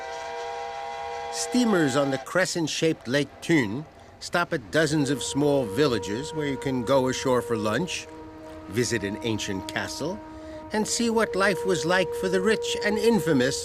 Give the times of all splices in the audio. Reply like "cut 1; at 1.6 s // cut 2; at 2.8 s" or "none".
none